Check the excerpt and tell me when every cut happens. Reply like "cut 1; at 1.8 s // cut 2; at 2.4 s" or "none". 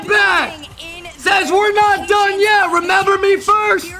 none